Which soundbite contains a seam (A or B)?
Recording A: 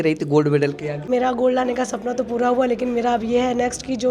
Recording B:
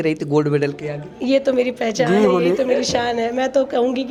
A